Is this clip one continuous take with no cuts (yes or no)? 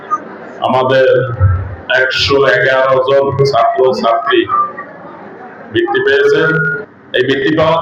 yes